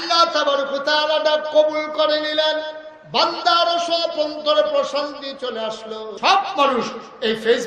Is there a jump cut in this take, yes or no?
yes